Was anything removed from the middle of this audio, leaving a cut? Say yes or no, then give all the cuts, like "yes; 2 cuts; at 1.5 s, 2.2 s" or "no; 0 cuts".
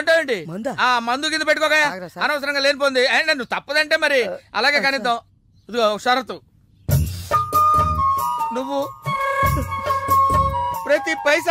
no; 0 cuts